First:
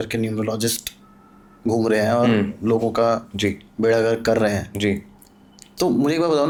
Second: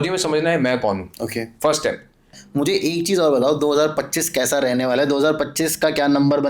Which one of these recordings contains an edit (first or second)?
second